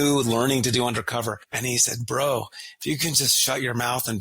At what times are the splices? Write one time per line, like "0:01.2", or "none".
0:01.5